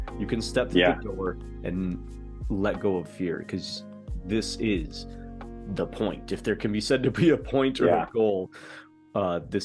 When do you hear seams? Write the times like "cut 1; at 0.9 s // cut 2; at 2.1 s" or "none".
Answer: none